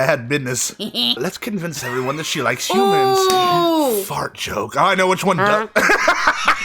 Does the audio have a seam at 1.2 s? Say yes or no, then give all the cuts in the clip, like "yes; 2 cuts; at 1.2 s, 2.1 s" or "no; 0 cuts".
yes; 1 cut; at 1.2 s